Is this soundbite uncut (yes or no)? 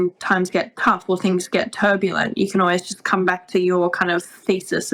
yes